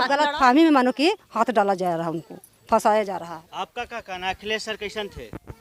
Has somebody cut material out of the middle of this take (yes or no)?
no